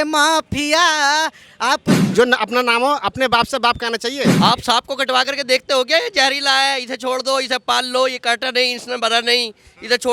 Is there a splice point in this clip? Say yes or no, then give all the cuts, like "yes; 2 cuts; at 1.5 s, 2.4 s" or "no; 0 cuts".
yes; 2 cuts; at 1.9 s, 4.3 s